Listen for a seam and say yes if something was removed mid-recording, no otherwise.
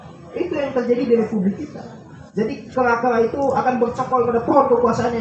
no